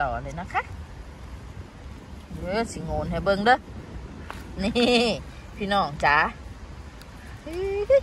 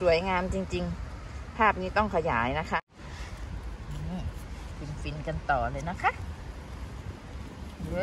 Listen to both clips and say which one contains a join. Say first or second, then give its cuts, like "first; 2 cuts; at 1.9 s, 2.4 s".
second; 1 cut; at 2.8 s